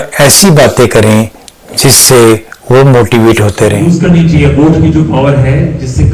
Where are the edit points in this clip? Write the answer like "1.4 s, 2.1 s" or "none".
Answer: 3.8 s